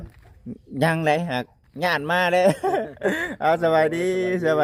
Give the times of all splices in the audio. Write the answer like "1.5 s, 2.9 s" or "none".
none